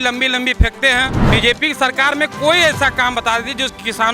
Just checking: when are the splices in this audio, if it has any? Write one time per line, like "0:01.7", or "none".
0:01.2